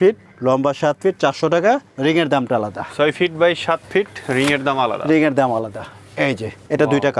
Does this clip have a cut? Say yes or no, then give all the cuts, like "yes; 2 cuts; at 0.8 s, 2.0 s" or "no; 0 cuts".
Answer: no; 0 cuts